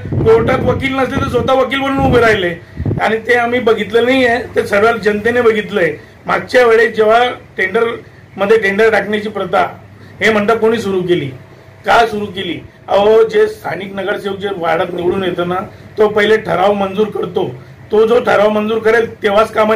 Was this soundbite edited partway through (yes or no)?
no